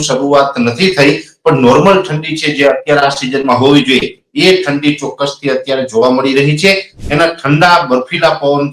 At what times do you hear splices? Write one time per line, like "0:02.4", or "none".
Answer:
0:07.0